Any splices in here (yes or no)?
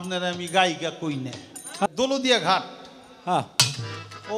yes